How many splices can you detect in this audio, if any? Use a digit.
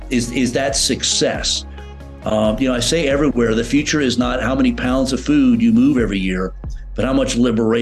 0